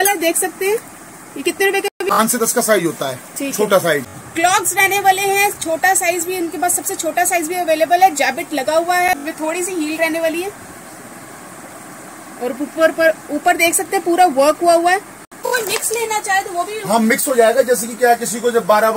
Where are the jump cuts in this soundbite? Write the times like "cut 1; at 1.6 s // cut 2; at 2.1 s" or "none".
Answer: cut 1; at 1.9 s // cut 2; at 4.2 s // cut 3; at 9.2 s // cut 4; at 15.4 s